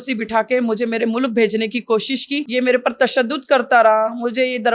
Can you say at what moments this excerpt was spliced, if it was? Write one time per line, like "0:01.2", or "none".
0:02.4